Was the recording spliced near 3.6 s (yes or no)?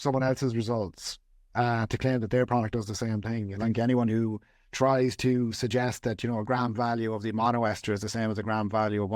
yes